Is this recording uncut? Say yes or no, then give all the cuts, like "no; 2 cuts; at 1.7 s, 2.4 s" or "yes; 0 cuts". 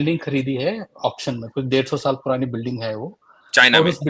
yes; 0 cuts